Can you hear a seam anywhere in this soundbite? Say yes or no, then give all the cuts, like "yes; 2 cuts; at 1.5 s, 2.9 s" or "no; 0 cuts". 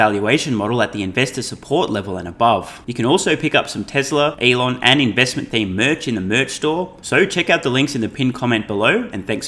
yes; 3 cuts; at 2.8 s, 4.4 s, 7.0 s